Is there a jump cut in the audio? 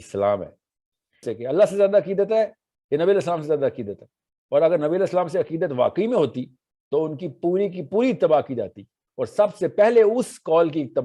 yes; 1 cut; at 1.2 s

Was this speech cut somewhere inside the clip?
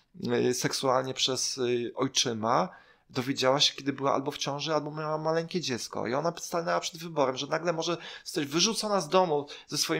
no; 0 cuts

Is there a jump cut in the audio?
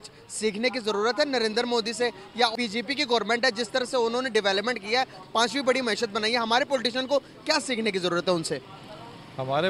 yes; 1 cut; at 2.5 s

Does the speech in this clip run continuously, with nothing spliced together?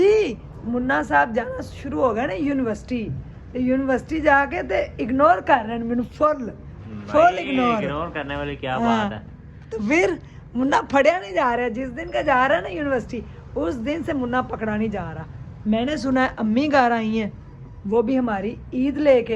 yes; 0 cuts

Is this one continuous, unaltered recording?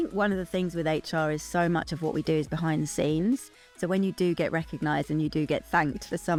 yes; 0 cuts

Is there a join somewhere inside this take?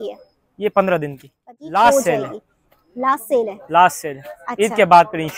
yes; 1 cut; at 1.5 s

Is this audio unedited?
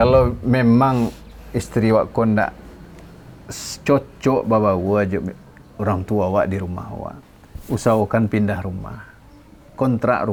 yes; 0 cuts

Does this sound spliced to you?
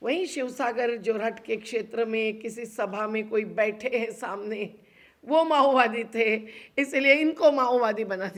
no; 0 cuts

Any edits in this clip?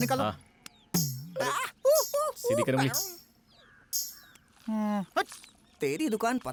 no; 0 cuts

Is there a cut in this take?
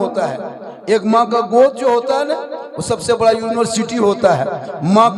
no; 0 cuts

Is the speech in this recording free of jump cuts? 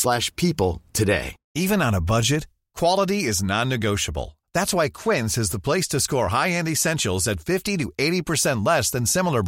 no; 1 cut; at 1.4 s

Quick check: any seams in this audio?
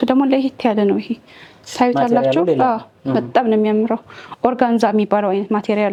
no; 0 cuts

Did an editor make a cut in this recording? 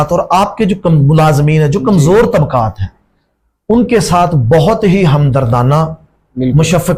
no; 0 cuts

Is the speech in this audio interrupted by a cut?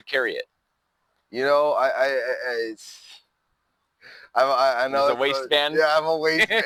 no; 0 cuts

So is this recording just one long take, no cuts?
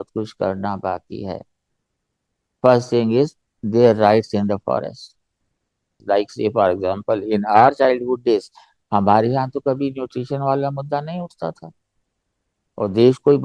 no; 1 cut; at 6.0 s

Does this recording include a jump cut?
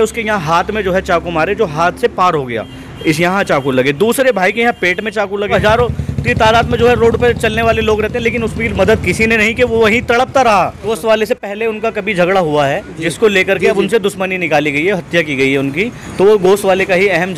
yes; 2 cuts; at 5.4 s, 10.9 s

